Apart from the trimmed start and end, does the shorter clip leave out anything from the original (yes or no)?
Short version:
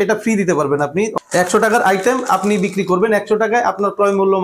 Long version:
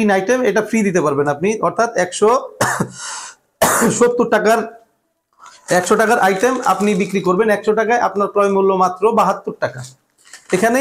yes